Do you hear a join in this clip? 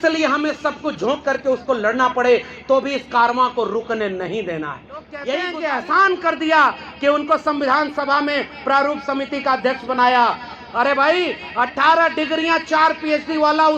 yes; 1 cut; at 5.4 s

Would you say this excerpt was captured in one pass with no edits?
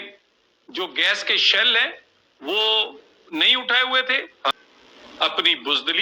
no; 1 cut; at 4.5 s

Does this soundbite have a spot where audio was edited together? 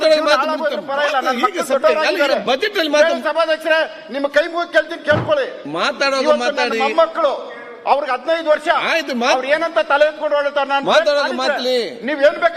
no; 0 cuts

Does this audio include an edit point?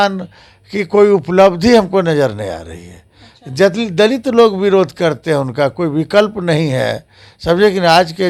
no; 0 cuts

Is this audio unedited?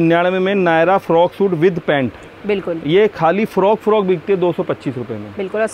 yes; 0 cuts

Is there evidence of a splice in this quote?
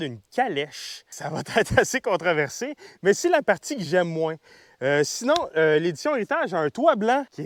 no; 0 cuts

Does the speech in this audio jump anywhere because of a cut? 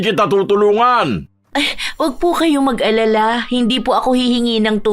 yes; 1 cut; at 1.3 s

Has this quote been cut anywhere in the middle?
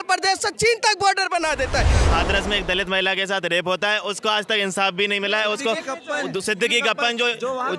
yes; 1 cut; at 2.0 s

